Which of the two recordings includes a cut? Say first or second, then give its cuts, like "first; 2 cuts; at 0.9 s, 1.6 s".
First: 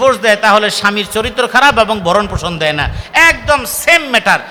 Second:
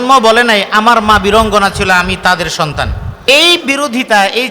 second; 1 cut; at 3.2 s